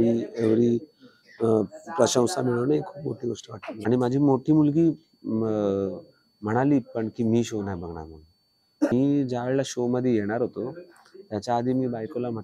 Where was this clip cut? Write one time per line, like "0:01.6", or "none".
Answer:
0:03.8
0:08.9